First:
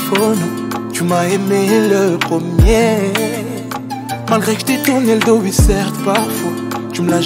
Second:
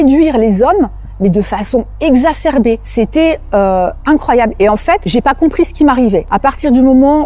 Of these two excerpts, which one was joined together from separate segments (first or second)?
second